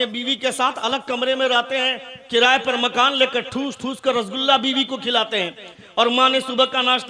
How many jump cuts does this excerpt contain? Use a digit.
0